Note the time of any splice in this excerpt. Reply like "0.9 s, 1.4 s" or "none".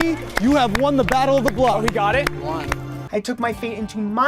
3.0 s

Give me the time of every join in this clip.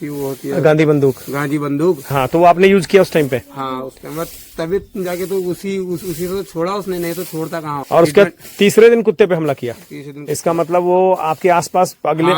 2.1 s, 7.8 s

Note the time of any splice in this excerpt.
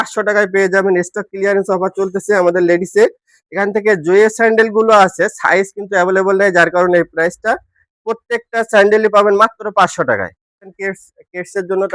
10.7 s

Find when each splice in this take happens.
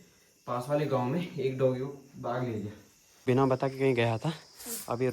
3.0 s

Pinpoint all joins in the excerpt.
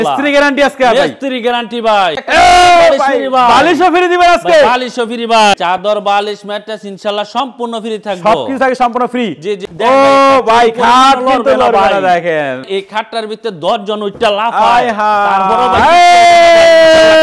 2.2 s, 5.6 s, 9.6 s, 12.7 s

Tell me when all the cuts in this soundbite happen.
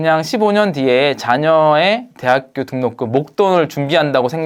none

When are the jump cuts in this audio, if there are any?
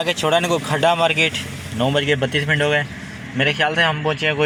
none

